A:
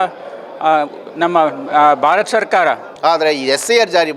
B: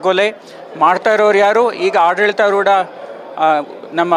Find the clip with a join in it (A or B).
A